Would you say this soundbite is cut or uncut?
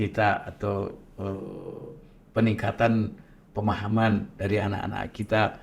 uncut